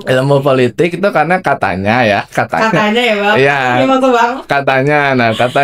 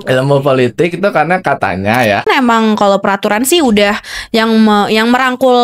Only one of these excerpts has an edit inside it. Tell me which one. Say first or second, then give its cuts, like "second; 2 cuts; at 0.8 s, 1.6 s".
second; 1 cut; at 2.2 s